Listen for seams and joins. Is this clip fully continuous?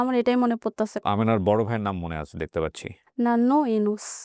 no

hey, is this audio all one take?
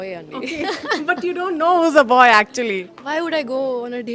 yes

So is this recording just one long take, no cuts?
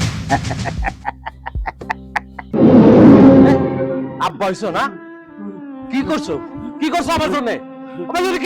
no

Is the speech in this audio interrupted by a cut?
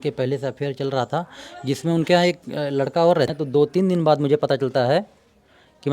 yes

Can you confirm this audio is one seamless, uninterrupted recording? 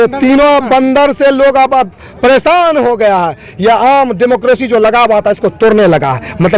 yes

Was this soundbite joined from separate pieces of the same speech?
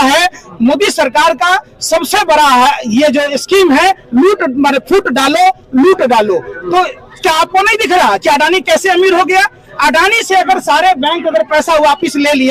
no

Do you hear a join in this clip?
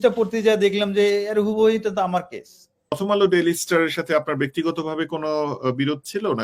yes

